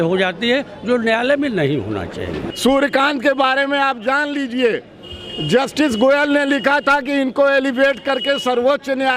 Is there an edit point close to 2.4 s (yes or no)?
yes